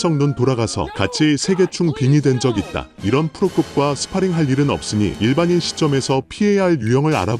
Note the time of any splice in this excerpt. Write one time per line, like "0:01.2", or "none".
0:02.9